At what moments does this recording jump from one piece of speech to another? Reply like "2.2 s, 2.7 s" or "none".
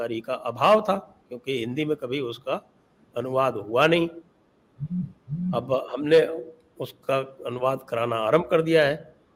none